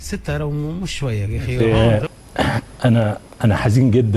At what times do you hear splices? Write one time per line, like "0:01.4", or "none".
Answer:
0:01.8